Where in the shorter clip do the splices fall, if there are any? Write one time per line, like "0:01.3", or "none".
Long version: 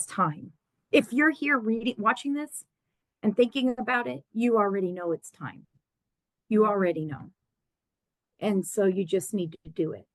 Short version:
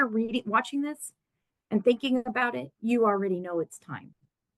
none